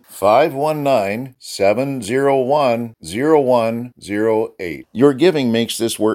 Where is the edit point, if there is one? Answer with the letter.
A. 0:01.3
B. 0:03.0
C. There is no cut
C